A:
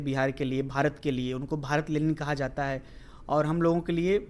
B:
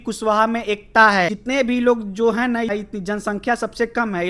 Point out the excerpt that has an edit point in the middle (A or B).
B